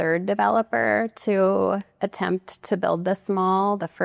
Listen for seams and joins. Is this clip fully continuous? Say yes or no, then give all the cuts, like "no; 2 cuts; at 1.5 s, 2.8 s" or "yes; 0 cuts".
yes; 0 cuts